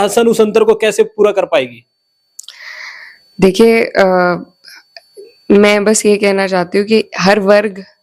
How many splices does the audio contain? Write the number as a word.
zero